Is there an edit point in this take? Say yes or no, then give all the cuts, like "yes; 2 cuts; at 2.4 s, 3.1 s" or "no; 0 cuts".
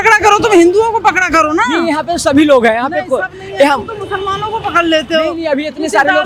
no; 0 cuts